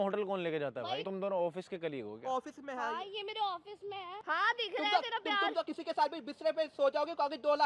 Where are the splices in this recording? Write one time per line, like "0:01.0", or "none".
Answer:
0:01.0
0:04.1